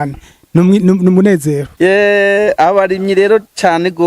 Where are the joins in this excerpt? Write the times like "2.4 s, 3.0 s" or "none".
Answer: 1.7 s